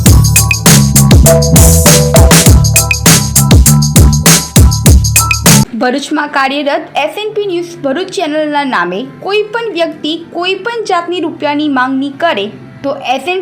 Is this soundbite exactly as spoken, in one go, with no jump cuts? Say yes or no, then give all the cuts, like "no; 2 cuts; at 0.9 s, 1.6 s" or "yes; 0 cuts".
no; 1 cut; at 5.7 s